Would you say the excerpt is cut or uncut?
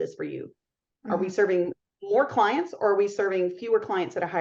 uncut